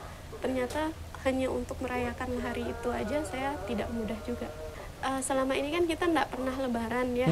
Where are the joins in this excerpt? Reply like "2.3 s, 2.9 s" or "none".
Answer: 4.7 s